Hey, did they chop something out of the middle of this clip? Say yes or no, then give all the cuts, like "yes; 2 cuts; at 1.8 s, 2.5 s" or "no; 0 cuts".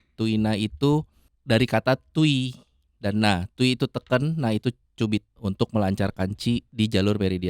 yes; 2 cuts; at 5.3 s, 6.7 s